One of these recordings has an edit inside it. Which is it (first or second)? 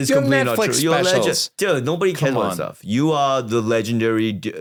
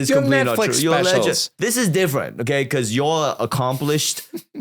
second